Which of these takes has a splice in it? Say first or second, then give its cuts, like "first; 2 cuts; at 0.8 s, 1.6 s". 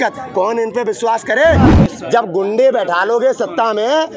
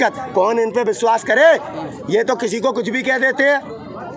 first; 1 cut; at 1.8 s